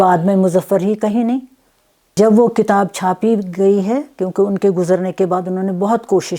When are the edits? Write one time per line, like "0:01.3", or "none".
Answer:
0:02.2